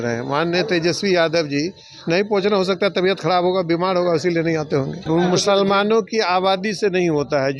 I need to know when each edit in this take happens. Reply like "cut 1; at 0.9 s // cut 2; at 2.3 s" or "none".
cut 1; at 5.0 s